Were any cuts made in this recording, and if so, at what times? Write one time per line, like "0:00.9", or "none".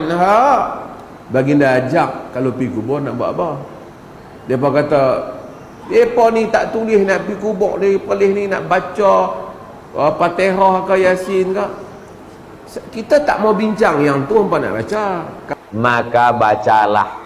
0:15.4